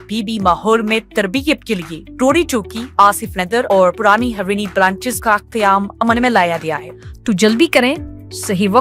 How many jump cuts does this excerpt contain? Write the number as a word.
one